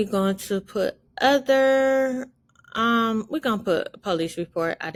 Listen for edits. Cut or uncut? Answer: uncut